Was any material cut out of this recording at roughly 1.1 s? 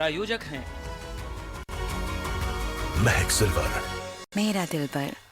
no; 1 cut; at 4.1 s

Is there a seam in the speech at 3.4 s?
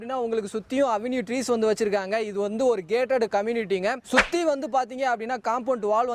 no; 0 cuts

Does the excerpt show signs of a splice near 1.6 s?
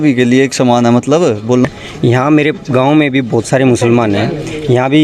yes; 1 cut; at 1.6 s

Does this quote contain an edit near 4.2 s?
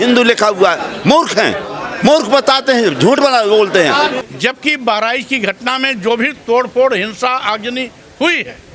yes; 1 cut; at 4.2 s

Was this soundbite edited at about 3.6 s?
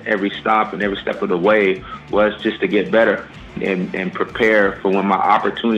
yes; 1 cut; at 3.6 s

